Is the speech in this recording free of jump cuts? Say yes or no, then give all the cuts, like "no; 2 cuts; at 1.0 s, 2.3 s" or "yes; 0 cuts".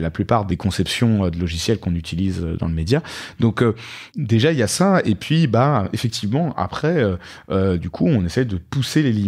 yes; 0 cuts